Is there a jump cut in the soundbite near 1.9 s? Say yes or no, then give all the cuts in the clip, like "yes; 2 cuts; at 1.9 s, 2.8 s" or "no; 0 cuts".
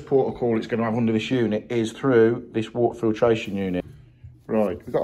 no; 1 cut; at 3.9 s